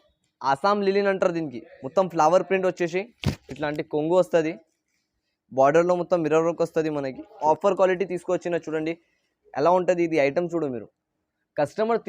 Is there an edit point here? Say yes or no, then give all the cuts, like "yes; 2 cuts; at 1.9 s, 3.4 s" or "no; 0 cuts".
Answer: yes; 1 cut; at 7.4 s